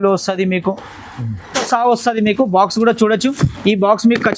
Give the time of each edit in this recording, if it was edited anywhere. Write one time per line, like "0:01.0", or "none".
0:01.6